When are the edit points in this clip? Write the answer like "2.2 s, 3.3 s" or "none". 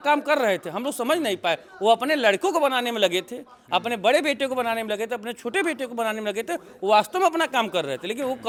none